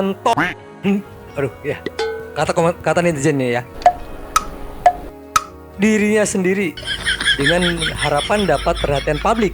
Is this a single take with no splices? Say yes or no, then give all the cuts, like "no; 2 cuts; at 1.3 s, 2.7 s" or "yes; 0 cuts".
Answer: yes; 0 cuts